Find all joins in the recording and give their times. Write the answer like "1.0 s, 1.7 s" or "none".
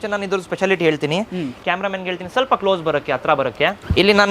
1.5 s